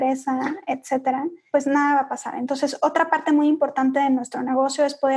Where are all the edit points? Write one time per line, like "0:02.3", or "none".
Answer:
0:01.4